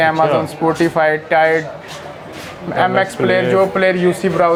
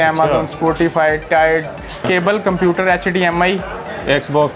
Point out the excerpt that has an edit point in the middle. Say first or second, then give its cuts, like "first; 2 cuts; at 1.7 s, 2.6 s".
second; 1 cut; at 2.0 s